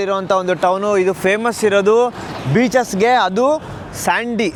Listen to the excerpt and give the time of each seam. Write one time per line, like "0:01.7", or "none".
none